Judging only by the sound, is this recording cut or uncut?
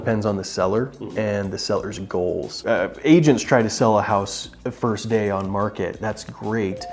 uncut